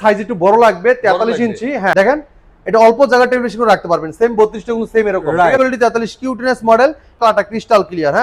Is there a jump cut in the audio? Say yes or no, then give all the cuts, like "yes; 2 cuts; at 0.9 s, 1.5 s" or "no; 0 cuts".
yes; 3 cuts; at 1.9 s, 5.6 s, 7.2 s